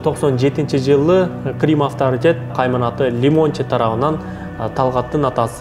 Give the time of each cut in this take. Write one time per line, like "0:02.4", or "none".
0:02.5